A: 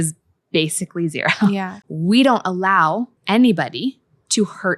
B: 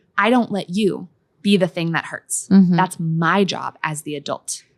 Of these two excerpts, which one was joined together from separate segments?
A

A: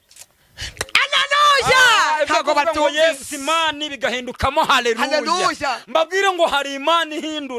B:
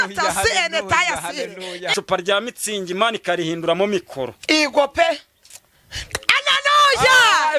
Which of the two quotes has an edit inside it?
B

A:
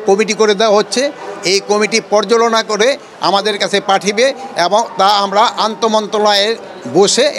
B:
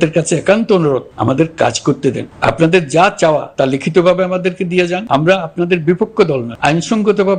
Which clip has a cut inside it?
B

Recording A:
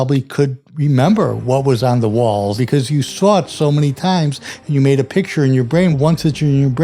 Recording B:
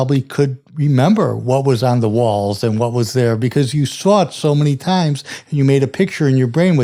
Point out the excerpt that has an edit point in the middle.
A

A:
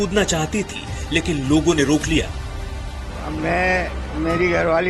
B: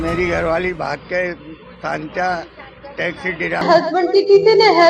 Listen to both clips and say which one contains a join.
B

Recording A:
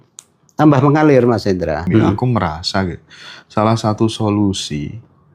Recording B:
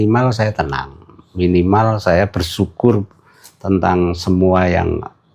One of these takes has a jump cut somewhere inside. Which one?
A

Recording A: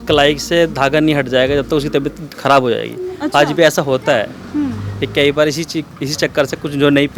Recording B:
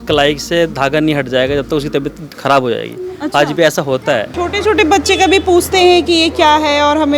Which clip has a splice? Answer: B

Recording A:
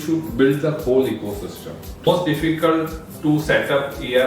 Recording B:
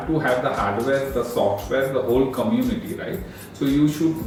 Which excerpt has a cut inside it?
A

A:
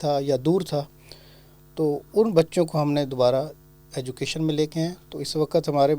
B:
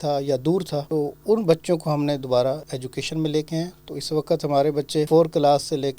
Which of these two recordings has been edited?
B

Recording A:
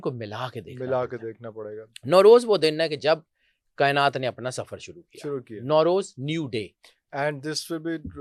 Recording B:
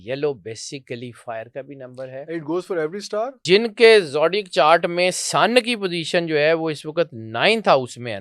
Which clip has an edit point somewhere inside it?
B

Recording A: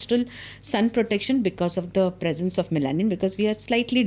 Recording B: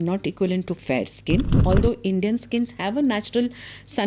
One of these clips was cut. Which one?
B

